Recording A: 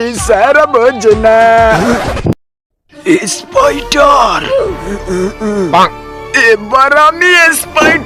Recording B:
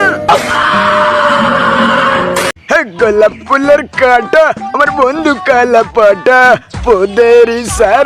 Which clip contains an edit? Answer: B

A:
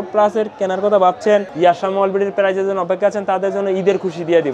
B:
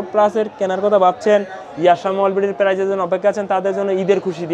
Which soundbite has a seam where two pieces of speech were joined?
A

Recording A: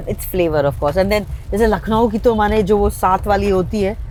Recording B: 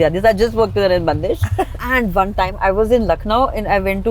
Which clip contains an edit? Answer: B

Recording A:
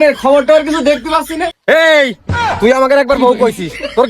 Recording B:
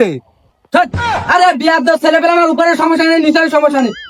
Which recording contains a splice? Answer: A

